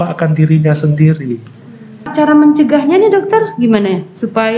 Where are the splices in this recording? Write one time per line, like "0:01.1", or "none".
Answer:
0:02.1